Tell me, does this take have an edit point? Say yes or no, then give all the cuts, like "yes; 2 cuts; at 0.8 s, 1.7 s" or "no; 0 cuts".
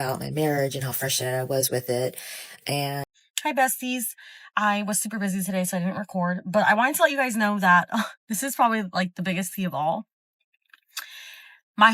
yes; 1 cut; at 3.0 s